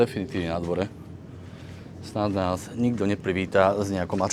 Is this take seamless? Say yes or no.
yes